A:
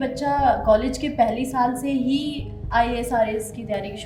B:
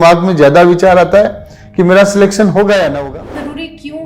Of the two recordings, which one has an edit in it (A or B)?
B